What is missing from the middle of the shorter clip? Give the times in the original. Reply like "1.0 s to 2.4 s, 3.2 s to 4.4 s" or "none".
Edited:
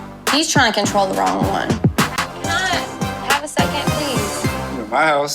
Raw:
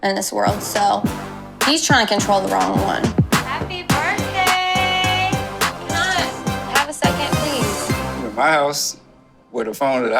3.5 s to 5.6 s

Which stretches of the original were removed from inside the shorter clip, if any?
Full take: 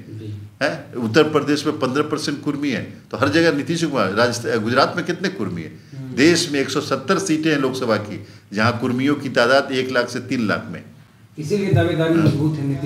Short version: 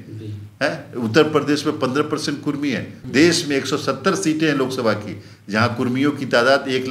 2.9 s to 6.0 s

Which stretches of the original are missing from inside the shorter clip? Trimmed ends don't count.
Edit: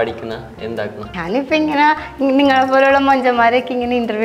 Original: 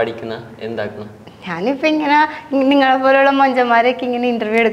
1.1 s to 1.4 s

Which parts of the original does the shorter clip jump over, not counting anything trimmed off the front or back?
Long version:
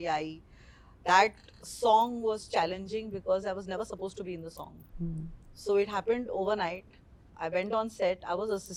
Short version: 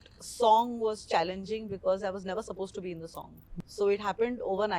4.9 s to 5.4 s

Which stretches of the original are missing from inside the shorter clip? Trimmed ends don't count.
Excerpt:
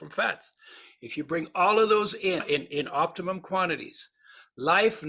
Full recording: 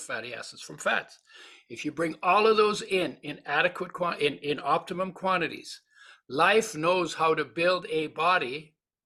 3.1 s to 4.2 s

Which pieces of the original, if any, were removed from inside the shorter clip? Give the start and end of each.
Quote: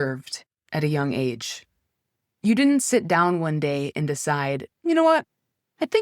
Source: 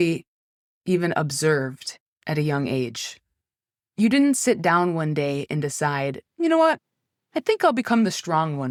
none

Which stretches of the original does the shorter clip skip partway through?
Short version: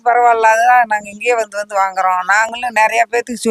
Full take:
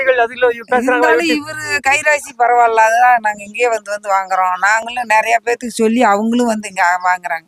none

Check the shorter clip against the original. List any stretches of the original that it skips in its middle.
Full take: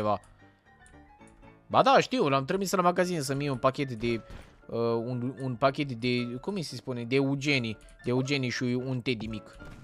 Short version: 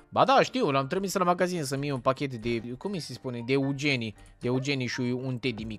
4.3 s to 6.3 s

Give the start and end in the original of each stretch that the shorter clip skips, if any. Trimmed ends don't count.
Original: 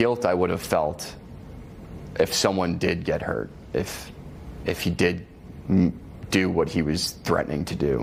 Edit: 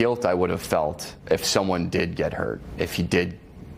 1.1 s to 2.0 s, 3.5 s to 4.5 s

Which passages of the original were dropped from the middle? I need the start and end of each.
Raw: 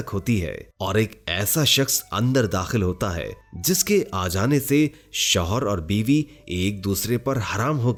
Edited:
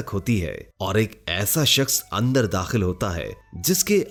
none

